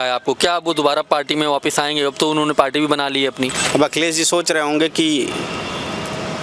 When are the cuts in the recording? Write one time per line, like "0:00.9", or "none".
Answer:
0:03.6